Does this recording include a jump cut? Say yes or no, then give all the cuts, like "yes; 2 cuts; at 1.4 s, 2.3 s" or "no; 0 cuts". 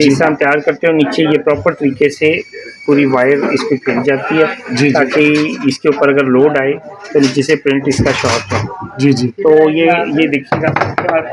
no; 0 cuts